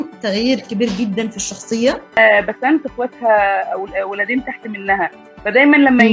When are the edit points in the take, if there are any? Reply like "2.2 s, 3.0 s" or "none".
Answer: 2.2 s